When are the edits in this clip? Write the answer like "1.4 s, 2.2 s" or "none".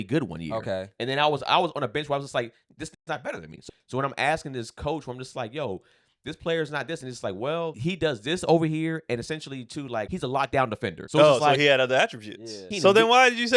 3.5 s, 7.8 s, 10.1 s, 11.0 s, 12.7 s